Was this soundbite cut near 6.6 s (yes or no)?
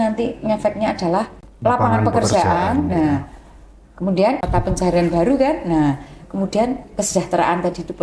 no